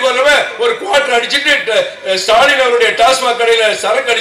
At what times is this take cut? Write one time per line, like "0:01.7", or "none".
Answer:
none